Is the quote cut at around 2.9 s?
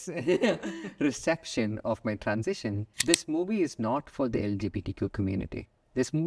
yes; 1 cut; at 2.9 s

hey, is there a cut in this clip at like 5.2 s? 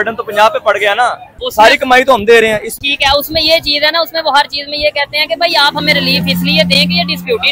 no; 2 cuts; at 1.4 s, 2.7 s

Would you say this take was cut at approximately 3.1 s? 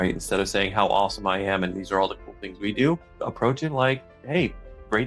yes; 1 cut; at 3.1 s

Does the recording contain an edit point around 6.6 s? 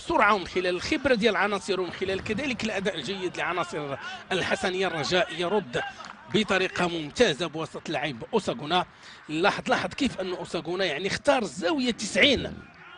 yes; 1 cut; at 6.6 s

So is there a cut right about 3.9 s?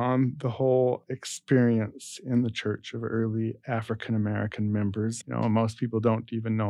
no; 1 cut; at 5.2 s

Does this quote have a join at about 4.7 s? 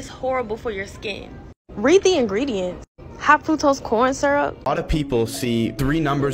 yes; 1 cut; at 4.7 s

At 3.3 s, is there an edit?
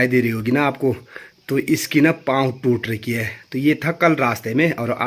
no; 0 cuts

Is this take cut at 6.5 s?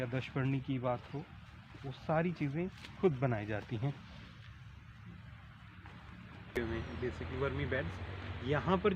yes; 1 cut; at 6.5 s

